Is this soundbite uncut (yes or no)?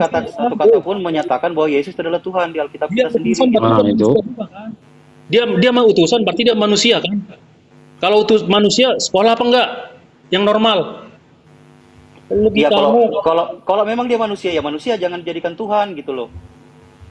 yes